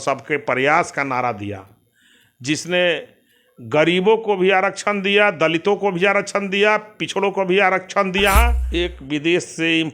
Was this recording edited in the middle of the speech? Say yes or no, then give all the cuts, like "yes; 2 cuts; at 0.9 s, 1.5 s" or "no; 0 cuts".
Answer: yes; 1 cut; at 8.6 s